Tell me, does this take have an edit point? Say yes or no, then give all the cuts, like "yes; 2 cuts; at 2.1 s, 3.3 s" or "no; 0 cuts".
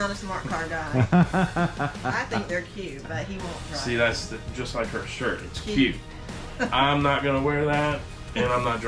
no; 0 cuts